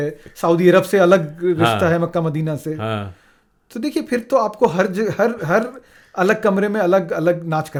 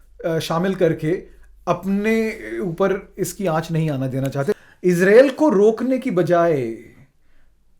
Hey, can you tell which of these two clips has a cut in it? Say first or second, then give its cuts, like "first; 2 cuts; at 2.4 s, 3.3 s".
second; 1 cut; at 4.4 s